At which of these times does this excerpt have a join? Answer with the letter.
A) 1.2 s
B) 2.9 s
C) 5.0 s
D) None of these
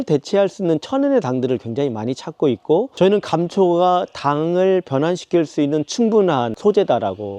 B